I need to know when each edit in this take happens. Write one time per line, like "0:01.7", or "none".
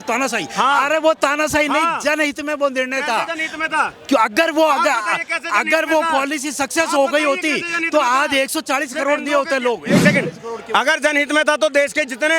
none